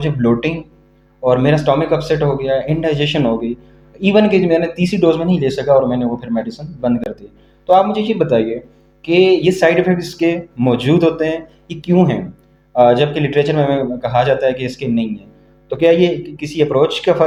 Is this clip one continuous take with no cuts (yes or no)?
yes